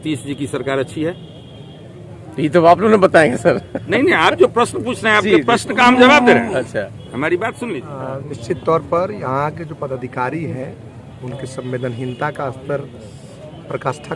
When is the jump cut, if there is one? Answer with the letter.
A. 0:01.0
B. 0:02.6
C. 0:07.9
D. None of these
C